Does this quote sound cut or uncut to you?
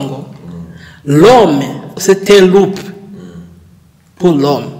cut